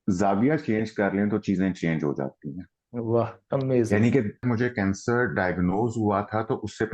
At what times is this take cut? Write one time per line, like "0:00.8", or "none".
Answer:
0:04.4